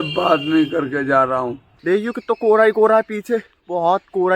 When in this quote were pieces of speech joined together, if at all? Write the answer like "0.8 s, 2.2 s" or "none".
1.8 s